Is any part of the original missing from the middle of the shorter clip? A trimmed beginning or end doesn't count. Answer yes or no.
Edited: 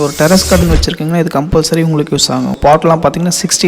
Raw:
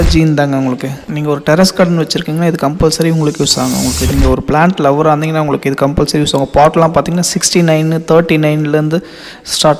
yes